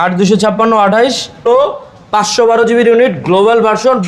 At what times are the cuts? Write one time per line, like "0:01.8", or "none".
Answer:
0:01.5